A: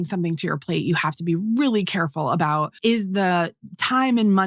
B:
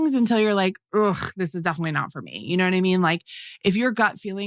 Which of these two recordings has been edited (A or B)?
A